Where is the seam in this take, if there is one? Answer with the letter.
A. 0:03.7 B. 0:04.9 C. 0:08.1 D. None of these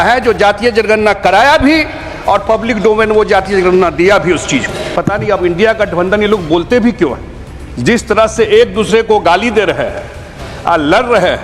B